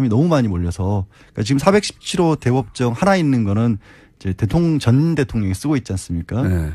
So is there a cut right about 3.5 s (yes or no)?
no